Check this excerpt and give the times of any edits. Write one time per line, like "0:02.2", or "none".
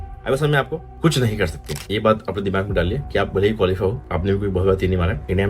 0:01.8

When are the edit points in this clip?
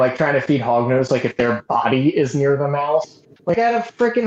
none

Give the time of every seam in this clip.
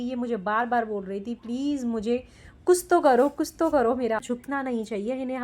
0:04.3

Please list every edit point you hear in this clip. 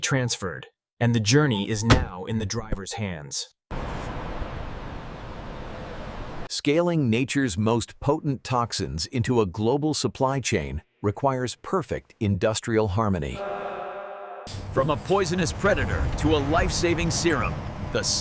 0:06.5
0:14.4

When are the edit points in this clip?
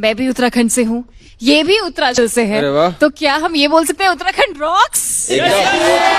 0:02.1

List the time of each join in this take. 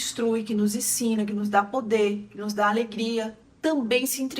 0:03.5

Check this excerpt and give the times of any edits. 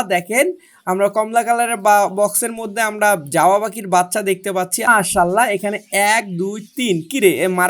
0:04.9

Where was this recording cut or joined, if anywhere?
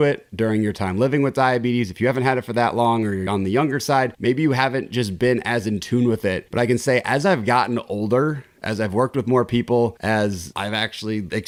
none

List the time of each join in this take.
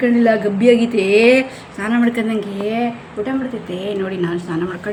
none

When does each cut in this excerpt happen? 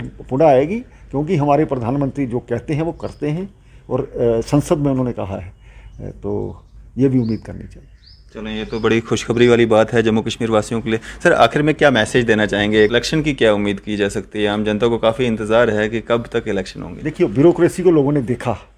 0:12.9

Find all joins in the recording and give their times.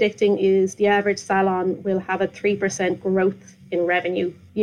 none

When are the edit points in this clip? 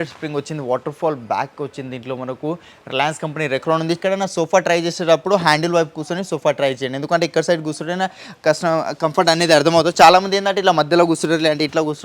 0:04.0

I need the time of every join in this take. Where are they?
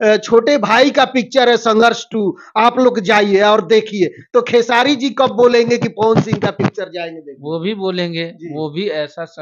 none

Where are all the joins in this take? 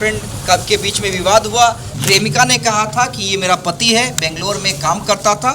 0:01.9

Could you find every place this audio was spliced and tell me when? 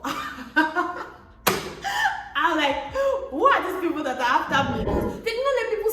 0:04.9

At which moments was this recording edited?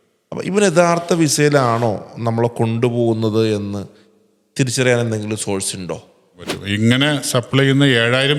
0:06.6

